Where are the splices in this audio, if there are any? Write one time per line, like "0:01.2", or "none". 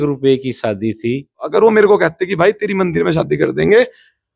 0:01.4